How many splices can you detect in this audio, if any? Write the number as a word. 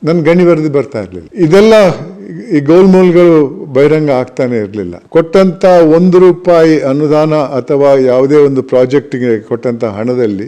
one